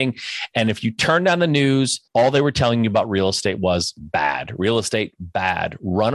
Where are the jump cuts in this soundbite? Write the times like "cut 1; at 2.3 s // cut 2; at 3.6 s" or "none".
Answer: cut 1; at 2.0 s